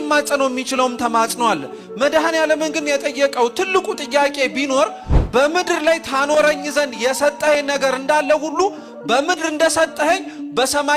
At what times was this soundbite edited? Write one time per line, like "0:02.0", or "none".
none